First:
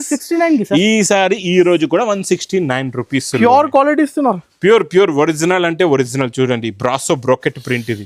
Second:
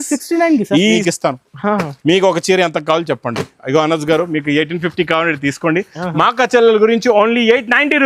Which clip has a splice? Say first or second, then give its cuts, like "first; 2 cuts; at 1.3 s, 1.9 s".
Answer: second; 1 cut; at 1.0 s